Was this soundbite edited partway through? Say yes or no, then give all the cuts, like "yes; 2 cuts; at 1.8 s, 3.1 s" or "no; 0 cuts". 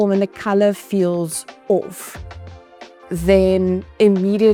no; 0 cuts